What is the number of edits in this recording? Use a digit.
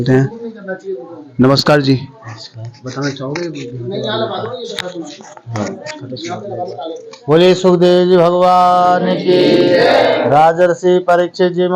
0